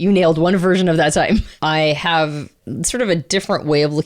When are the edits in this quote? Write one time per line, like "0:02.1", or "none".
0:01.5
0:02.6

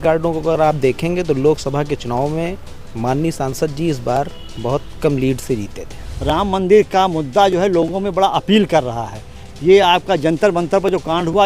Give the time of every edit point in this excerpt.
0:06.1

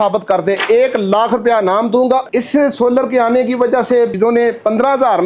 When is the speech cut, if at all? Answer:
0:02.3
0:04.1

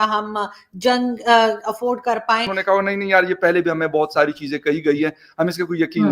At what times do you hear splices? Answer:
0:02.5

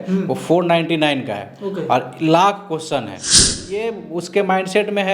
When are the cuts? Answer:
0:03.4

